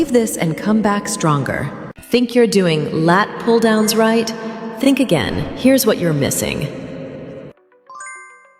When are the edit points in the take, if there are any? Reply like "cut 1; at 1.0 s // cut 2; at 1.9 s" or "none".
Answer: cut 1; at 1.8 s